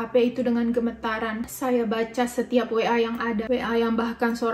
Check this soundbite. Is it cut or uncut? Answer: uncut